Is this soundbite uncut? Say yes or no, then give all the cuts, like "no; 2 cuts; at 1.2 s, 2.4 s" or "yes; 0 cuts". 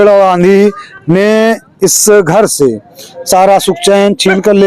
yes; 0 cuts